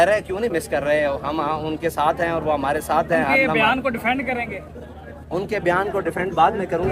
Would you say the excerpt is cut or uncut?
uncut